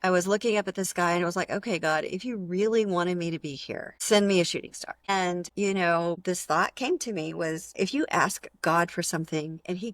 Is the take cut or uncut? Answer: cut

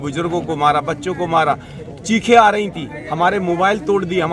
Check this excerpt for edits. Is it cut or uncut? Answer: uncut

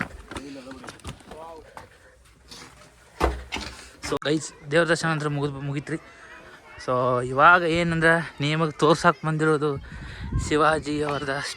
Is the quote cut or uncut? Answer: cut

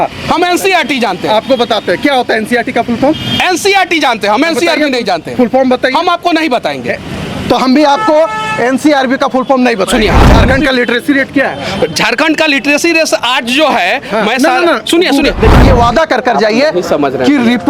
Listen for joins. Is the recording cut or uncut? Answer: cut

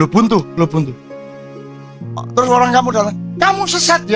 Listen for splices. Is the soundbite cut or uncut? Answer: cut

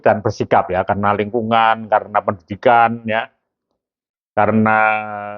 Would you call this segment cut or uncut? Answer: uncut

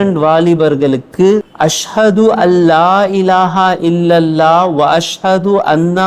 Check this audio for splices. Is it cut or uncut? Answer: cut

